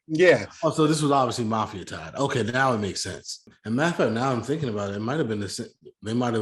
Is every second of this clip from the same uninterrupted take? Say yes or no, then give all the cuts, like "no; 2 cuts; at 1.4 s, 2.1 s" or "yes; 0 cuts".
no; 1 cut; at 3.5 s